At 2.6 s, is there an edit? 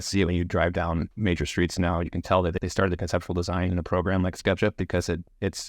yes; 2 cuts; at 1.1 s, 2.6 s

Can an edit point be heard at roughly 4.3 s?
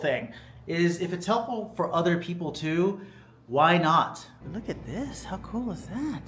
yes; 1 cut; at 4.3 s

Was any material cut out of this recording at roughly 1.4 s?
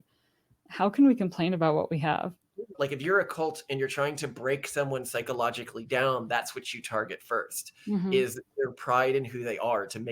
no; 1 cut; at 2.7 s

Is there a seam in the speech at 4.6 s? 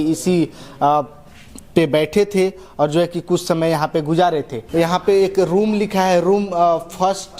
yes; 1 cut; at 4.6 s

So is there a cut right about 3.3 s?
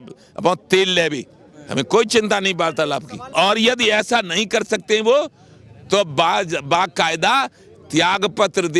yes; 1 cut; at 3.3 s

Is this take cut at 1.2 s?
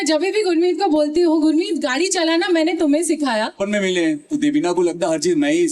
no; 1 cut; at 3.6 s

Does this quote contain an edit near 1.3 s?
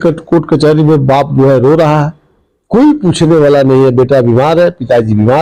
no; 0 cuts

